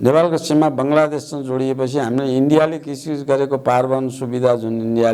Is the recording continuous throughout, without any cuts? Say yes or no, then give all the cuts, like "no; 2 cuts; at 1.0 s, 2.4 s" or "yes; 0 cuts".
yes; 0 cuts